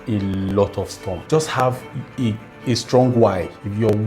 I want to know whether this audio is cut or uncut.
cut